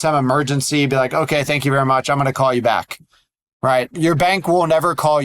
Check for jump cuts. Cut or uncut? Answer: cut